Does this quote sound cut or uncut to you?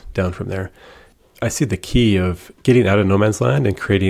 cut